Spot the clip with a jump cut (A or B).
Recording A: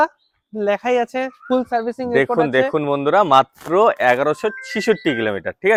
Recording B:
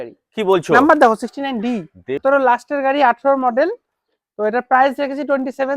B